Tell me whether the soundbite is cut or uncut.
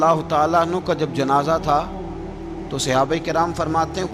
uncut